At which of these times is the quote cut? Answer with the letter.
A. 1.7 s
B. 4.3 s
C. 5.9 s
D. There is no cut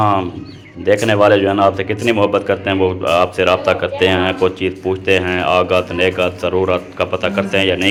D